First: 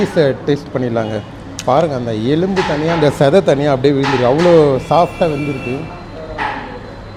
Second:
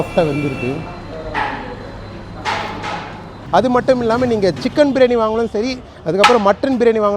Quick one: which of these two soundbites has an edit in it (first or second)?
second